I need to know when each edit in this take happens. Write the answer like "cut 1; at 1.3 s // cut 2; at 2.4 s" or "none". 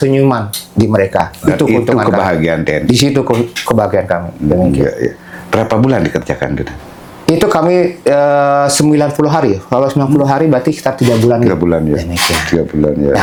none